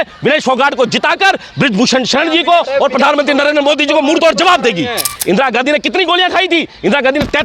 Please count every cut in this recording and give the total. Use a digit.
1